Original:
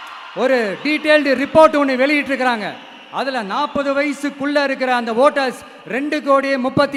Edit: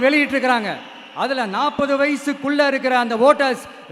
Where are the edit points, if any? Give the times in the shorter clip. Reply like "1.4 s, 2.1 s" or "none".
none